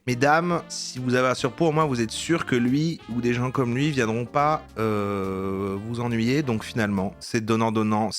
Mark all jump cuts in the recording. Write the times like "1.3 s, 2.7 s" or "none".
7.2 s